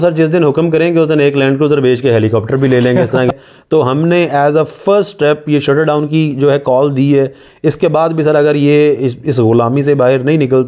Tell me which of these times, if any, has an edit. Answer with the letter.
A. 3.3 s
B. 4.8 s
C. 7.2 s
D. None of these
A